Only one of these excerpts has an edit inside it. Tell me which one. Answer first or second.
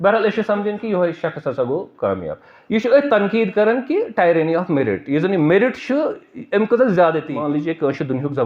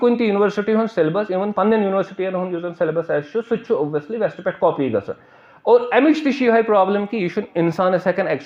first